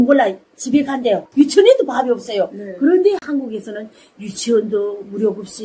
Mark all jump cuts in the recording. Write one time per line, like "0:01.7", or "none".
0:01.3